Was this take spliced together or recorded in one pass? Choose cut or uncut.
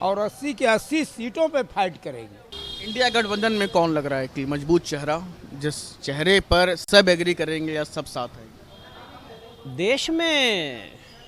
uncut